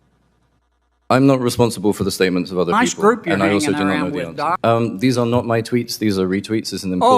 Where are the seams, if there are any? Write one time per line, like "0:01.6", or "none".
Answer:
0:04.6